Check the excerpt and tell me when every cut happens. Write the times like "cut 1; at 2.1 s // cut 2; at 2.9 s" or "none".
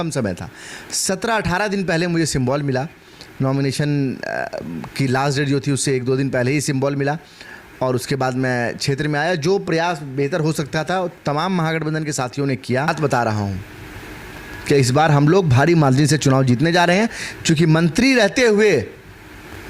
cut 1; at 12.9 s